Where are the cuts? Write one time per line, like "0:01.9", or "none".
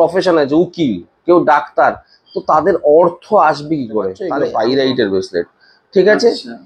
0:04.2

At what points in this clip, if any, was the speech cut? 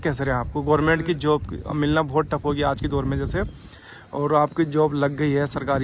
none

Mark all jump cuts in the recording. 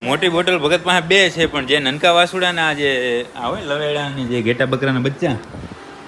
none

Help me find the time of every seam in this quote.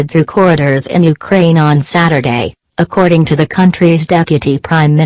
none

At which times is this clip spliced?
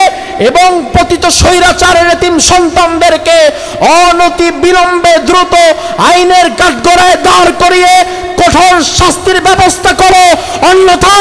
none

